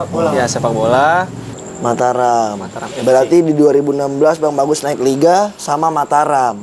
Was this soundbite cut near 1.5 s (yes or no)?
yes